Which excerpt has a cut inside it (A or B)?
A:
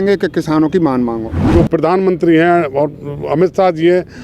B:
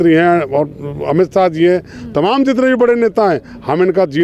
A